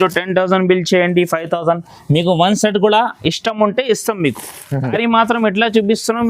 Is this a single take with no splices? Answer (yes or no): no